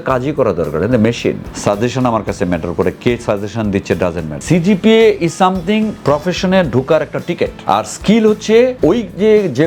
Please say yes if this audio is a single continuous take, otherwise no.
no